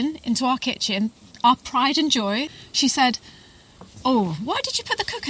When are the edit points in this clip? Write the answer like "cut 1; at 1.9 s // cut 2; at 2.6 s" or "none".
cut 1; at 2.5 s